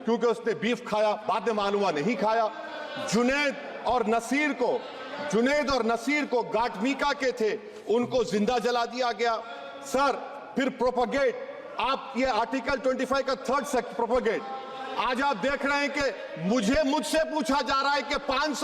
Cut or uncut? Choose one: uncut